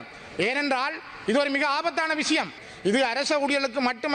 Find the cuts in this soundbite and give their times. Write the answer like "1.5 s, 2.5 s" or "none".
2.6 s